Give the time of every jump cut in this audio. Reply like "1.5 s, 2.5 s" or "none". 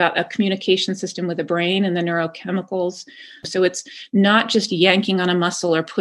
3.4 s